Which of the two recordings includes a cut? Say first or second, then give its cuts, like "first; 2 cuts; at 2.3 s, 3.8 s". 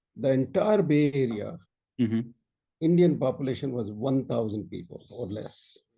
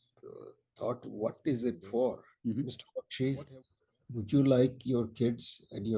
second; 1 cut; at 2.3 s